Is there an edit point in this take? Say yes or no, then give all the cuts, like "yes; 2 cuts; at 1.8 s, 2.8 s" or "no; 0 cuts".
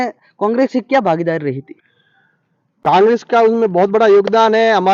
no; 0 cuts